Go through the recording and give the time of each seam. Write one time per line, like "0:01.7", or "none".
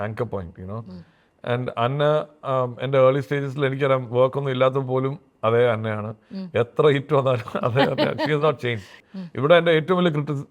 0:09.0